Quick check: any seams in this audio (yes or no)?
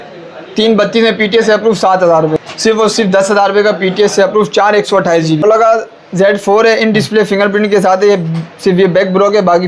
yes